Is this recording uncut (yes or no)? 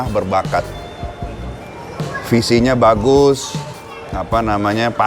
yes